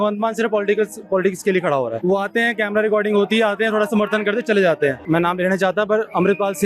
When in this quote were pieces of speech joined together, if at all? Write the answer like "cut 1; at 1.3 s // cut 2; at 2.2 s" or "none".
cut 1; at 2.0 s // cut 2; at 5.0 s